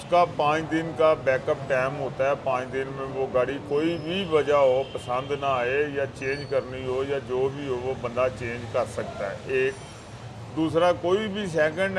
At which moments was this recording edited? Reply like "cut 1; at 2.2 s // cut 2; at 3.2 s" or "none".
none